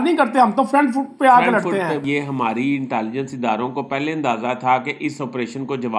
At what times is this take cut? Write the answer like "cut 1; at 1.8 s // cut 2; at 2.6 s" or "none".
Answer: cut 1; at 2.0 s